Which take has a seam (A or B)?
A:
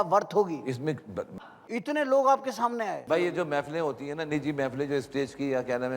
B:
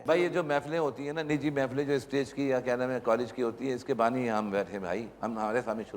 A